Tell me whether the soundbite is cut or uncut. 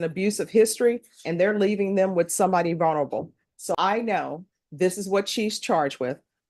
cut